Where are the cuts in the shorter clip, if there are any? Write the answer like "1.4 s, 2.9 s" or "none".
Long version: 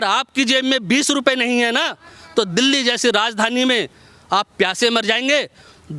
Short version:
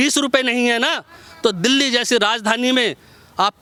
none